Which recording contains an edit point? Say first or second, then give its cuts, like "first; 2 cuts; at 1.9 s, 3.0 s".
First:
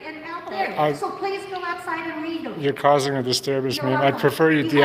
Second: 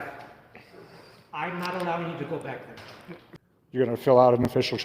second; 1 cut; at 3.3 s